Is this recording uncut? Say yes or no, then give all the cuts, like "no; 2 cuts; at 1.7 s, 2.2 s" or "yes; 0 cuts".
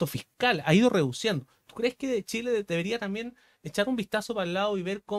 yes; 0 cuts